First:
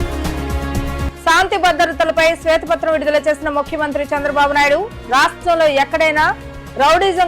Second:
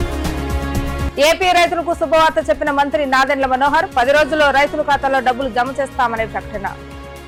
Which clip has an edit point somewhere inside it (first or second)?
first